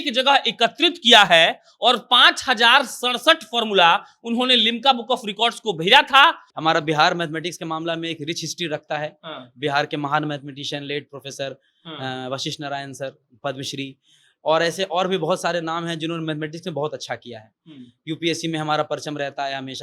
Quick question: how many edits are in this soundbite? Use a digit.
1